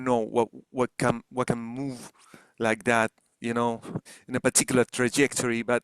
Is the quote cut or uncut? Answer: cut